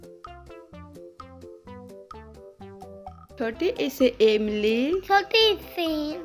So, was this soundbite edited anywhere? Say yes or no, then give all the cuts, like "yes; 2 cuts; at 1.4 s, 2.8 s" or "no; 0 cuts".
yes; 1 cut; at 3.2 s